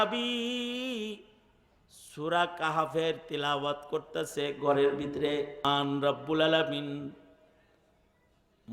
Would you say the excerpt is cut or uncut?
cut